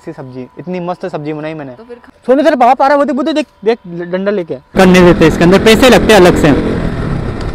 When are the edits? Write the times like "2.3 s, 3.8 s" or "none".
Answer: 2.1 s, 4.7 s